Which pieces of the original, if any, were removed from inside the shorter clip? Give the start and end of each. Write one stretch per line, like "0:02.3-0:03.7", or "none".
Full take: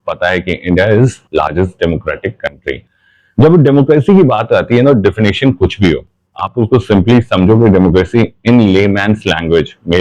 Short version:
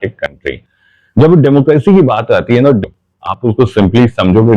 0:05.0-0:05.9